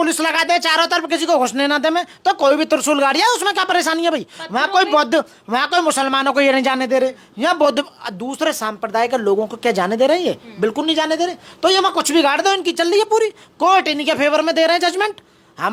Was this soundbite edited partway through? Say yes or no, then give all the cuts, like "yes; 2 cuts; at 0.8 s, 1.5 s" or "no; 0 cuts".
no; 0 cuts